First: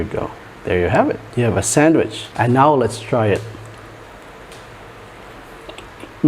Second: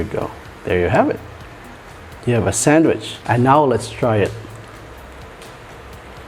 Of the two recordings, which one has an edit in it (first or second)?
first